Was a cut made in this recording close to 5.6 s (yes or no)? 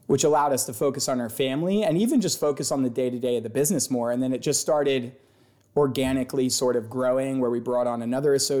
no